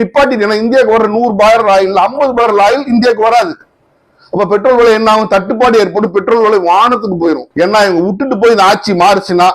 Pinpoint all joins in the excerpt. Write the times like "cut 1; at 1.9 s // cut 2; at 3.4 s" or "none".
cut 1; at 7.5 s